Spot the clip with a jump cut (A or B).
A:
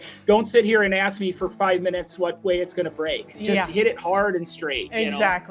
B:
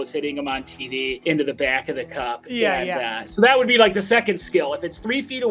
B